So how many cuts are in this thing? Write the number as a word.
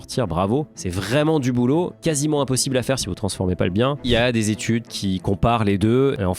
two